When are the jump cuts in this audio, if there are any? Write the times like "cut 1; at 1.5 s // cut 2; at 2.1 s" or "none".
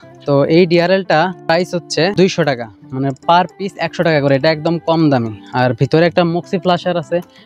none

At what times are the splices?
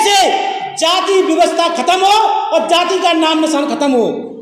none

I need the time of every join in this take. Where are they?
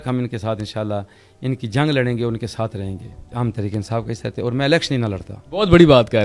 cut 1; at 3.2 s // cut 2; at 5.3 s

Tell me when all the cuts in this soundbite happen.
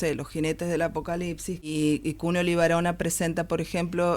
cut 1; at 1.7 s

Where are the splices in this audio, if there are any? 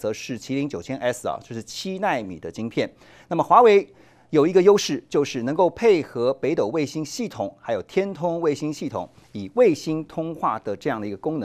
none

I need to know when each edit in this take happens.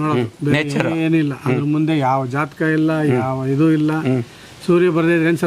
none

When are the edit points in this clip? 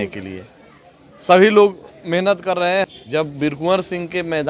cut 1; at 2.9 s

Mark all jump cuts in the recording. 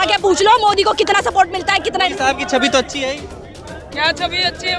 cut 1; at 2.1 s

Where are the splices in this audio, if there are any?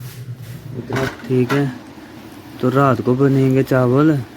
cut 1; at 1.1 s

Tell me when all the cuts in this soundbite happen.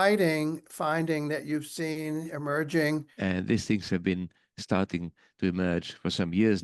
cut 1; at 3.1 s

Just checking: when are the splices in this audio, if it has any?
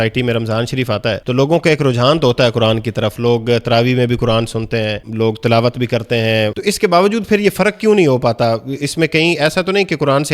cut 1; at 1.2 s // cut 2; at 5.1 s // cut 3; at 6.6 s

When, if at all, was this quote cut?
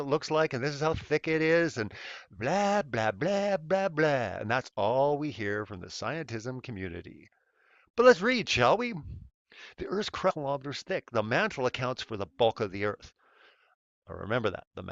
none

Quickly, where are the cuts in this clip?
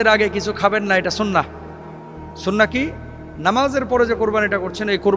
none

